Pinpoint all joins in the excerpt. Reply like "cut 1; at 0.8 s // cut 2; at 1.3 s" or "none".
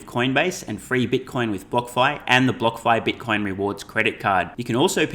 none